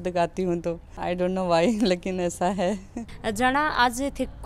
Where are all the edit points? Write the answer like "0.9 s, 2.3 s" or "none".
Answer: none